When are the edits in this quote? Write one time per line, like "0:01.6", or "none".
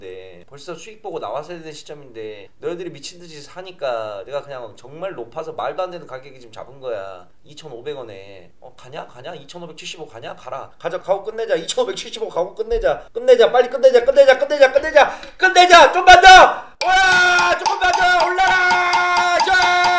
none